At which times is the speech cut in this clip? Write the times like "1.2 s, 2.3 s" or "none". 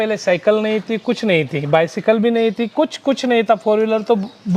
none